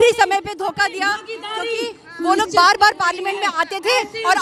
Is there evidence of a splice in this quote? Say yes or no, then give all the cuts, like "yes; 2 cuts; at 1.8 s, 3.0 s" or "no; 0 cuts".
no; 0 cuts